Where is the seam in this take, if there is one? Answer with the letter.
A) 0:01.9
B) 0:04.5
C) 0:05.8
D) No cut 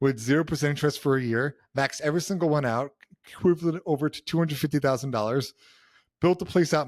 D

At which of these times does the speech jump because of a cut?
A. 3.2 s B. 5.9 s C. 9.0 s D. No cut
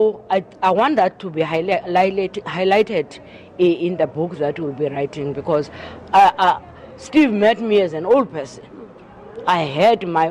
D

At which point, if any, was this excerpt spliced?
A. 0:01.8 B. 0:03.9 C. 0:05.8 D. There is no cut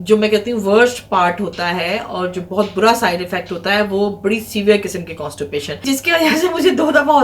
C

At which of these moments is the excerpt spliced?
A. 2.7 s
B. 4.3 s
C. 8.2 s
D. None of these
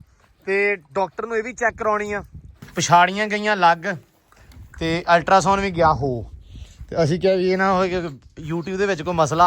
A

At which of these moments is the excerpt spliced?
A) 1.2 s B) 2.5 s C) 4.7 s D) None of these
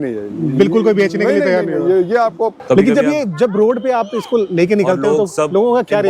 B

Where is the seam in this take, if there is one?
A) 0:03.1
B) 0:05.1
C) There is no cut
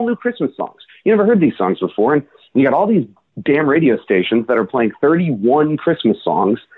C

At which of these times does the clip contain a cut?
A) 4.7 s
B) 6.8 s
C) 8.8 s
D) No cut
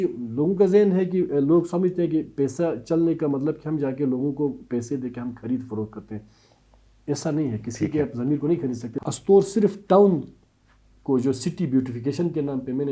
C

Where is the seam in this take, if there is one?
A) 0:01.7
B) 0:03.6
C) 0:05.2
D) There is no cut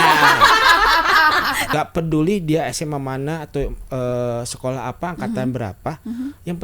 A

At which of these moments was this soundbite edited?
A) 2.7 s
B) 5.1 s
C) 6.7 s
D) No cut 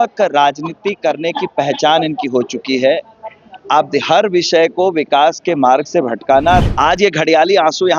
C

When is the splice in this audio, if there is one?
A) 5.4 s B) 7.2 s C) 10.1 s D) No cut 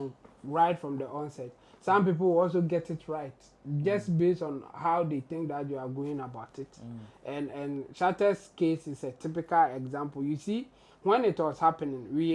D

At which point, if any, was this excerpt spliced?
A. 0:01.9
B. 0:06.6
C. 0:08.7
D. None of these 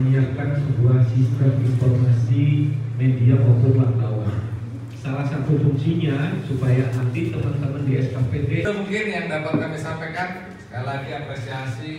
C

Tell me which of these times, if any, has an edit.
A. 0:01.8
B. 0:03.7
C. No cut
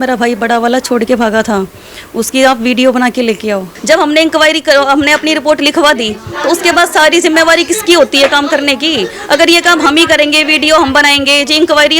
B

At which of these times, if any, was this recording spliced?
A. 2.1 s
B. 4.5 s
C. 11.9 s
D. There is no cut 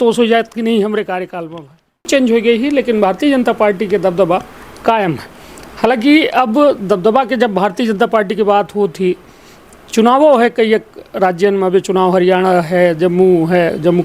A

